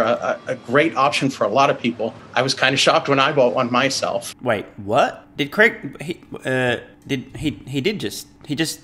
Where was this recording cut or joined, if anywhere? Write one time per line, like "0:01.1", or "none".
none